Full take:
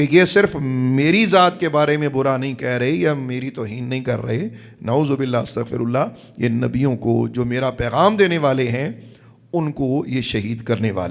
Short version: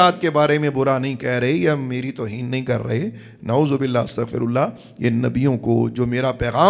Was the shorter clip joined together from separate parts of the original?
no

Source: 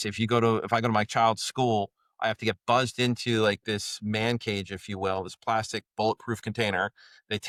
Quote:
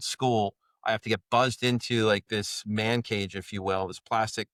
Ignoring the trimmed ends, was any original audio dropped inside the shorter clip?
no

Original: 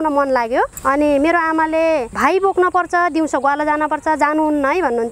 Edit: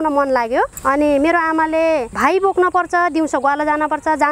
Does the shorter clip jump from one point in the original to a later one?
no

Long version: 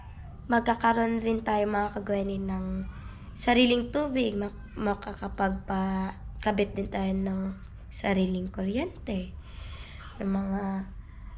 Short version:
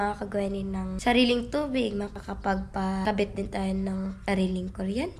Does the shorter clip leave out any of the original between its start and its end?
yes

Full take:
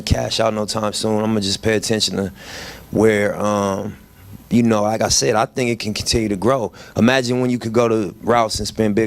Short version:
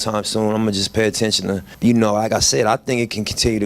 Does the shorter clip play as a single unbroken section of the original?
no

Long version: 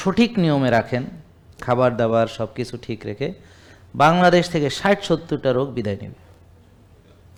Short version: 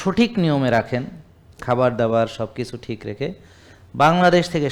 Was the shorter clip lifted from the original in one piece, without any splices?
yes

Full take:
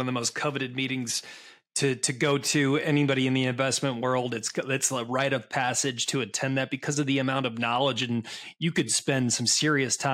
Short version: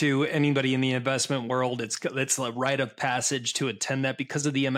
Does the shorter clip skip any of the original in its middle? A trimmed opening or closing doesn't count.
no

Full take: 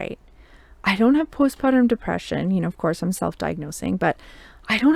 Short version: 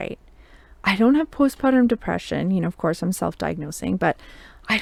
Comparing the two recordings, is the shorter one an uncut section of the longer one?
yes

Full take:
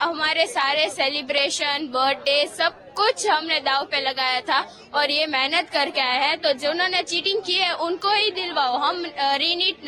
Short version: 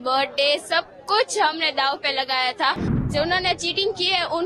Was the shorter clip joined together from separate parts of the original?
yes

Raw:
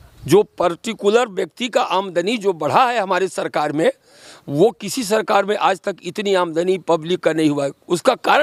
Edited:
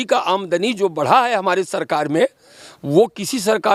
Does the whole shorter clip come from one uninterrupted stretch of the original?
yes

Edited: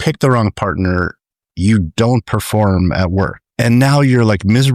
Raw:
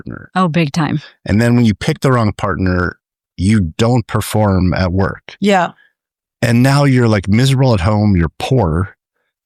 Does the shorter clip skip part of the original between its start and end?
yes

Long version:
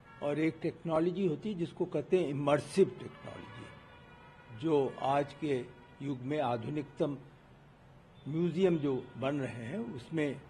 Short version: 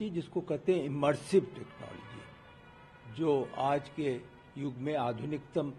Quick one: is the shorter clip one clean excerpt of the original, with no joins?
yes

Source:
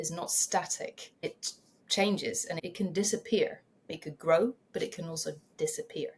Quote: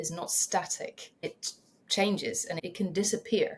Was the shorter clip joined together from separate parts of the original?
no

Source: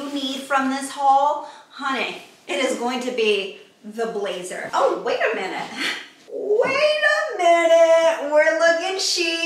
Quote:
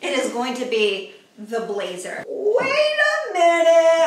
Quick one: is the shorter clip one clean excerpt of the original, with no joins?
no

